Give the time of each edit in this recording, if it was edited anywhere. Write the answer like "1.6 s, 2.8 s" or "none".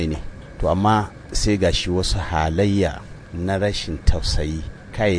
none